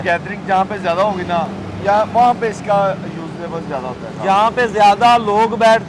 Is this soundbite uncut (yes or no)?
yes